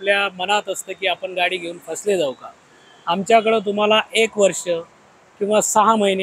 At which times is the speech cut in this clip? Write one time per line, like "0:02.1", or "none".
none